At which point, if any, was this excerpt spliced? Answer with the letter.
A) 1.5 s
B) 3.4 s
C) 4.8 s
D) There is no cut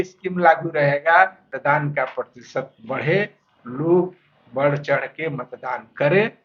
A